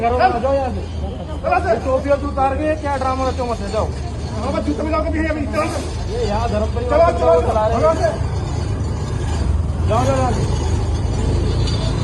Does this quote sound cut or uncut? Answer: uncut